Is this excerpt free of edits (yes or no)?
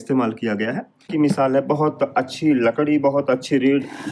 no